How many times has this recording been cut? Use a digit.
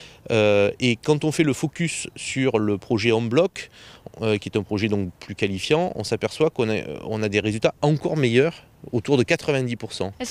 1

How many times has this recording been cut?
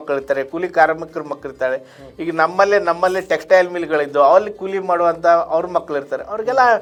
0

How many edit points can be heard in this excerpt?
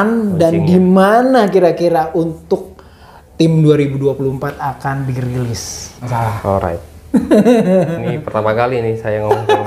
1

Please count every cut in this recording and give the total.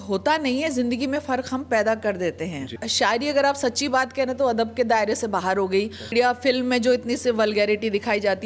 2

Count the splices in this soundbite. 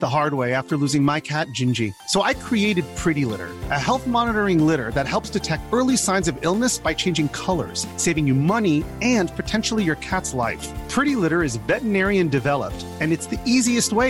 0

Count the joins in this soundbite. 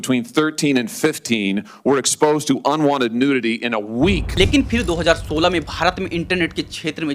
1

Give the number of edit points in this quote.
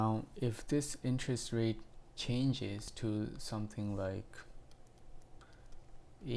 1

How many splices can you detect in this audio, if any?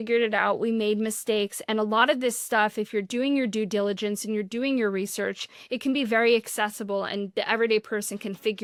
0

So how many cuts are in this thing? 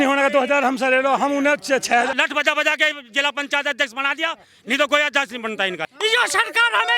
2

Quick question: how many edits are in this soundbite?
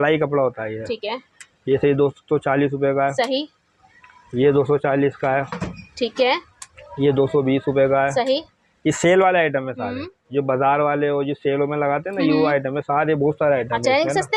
0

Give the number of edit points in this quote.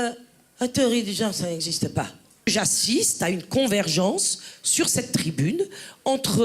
1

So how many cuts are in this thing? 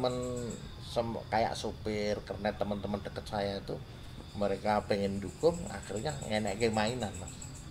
0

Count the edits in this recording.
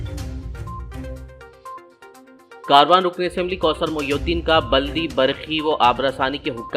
0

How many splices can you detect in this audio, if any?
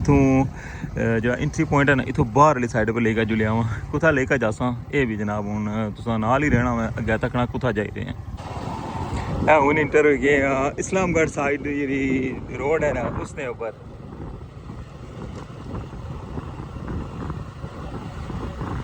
1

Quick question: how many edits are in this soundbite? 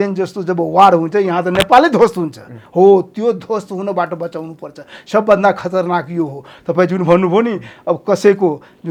0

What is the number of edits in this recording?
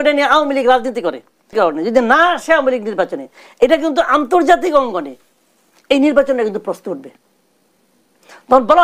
1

